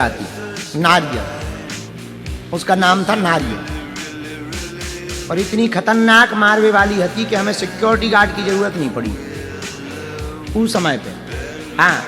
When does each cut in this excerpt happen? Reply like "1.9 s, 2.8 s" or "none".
4.1 s, 5.3 s